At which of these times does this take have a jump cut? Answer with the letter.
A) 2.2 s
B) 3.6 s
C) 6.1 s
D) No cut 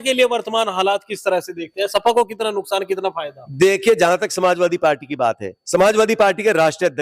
D